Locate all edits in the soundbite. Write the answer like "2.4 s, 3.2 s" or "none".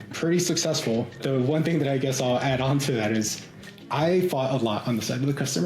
1.2 s